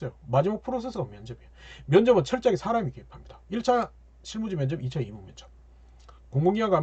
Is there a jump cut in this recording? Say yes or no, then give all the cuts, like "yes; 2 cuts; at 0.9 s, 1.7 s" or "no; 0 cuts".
no; 0 cuts